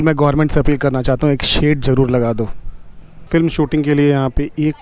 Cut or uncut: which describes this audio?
cut